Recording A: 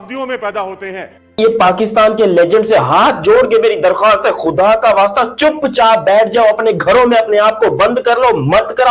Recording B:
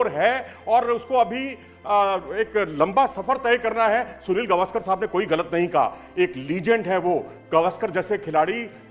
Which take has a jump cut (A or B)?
A